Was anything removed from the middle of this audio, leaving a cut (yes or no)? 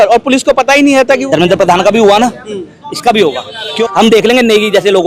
yes